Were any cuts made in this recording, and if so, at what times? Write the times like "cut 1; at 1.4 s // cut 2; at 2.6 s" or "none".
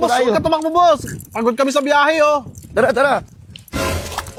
none